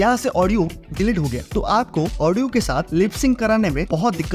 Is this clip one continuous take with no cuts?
yes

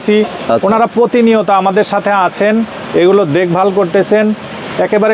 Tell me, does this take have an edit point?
no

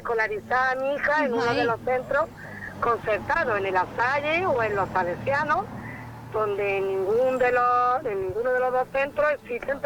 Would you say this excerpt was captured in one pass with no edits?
yes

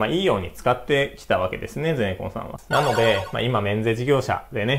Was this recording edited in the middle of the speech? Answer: yes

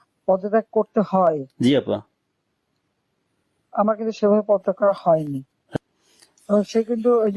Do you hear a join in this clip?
yes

